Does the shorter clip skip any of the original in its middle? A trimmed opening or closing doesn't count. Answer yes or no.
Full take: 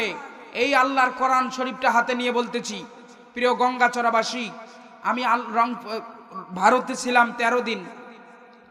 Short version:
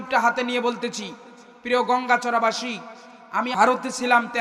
yes